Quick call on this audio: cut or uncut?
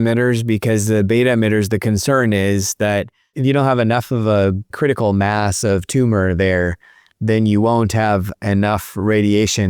cut